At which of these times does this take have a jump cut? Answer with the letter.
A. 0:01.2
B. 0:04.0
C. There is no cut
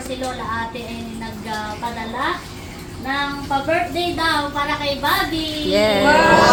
C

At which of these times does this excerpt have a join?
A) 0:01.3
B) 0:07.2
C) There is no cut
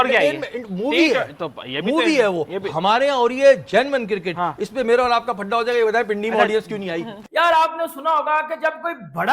B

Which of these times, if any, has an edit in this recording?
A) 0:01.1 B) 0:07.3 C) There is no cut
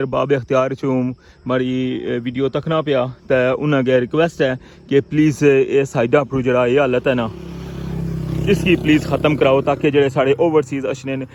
C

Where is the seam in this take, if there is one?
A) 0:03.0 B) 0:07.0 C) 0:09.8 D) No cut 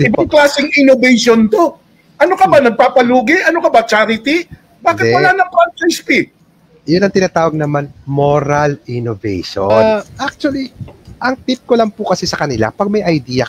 C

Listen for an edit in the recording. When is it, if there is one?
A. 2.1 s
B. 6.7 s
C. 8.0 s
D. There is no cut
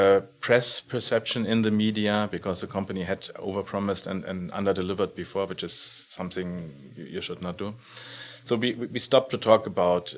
D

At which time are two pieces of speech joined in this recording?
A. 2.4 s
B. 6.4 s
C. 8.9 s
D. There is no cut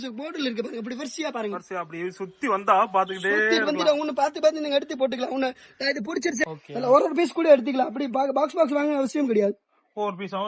B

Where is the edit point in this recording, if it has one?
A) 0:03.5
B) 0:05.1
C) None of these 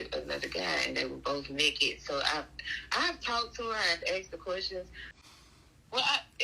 B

